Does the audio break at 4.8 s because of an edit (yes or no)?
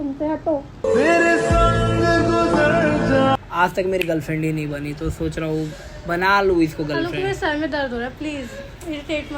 no